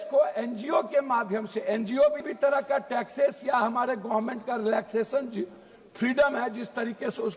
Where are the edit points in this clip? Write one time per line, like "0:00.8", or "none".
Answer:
0:02.2